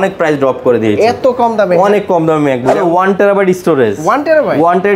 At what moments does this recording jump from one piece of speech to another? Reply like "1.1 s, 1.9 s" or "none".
2.8 s

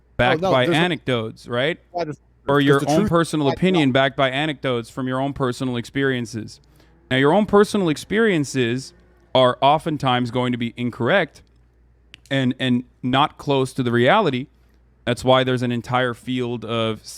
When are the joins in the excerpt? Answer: 2.3 s

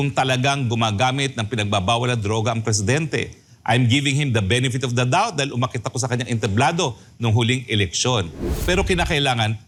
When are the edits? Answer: none

